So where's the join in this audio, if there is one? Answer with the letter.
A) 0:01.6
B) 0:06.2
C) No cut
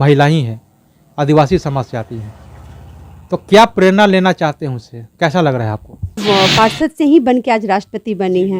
B